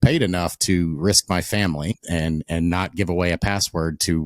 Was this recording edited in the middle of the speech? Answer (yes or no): yes